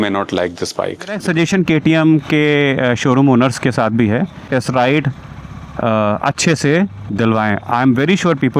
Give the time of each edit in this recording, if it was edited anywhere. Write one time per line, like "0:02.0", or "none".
0:01.2
0:04.5